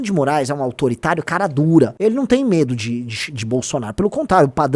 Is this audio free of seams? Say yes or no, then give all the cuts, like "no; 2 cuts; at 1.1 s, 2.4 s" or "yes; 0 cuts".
no; 1 cut; at 1.9 s